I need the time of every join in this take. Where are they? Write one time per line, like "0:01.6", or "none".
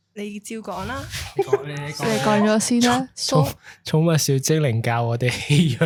none